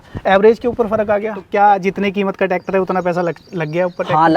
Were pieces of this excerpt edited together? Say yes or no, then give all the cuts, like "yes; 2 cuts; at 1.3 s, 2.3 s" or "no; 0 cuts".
yes; 1 cut; at 1.4 s